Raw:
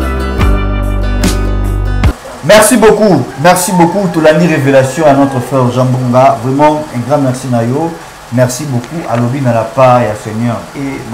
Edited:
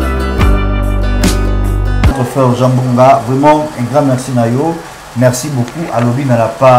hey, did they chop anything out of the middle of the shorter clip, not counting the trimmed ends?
yes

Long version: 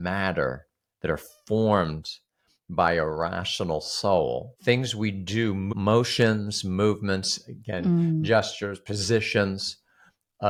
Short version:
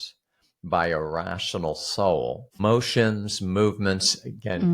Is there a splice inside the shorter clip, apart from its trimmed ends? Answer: yes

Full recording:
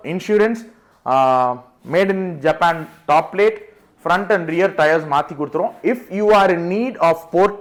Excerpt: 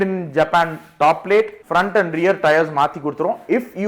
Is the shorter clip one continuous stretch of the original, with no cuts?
no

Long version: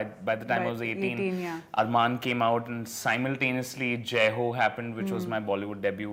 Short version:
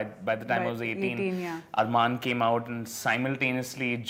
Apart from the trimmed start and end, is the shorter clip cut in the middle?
no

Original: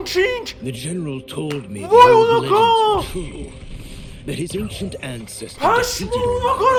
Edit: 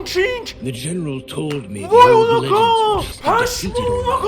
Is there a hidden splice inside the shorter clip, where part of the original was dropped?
yes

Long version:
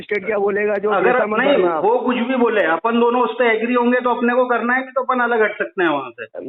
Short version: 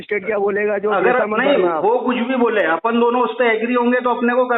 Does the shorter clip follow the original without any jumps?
yes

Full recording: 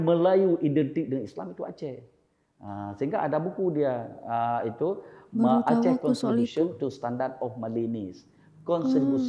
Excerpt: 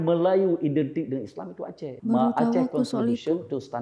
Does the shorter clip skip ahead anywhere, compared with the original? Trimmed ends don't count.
yes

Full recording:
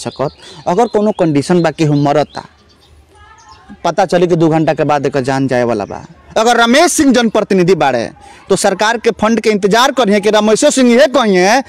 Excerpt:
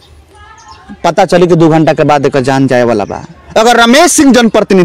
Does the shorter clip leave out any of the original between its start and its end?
no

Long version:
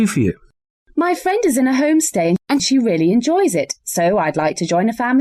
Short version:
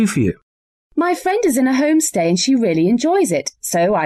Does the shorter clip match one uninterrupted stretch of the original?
no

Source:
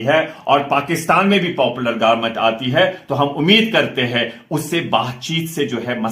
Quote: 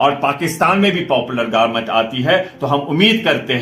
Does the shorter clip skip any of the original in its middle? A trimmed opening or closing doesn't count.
no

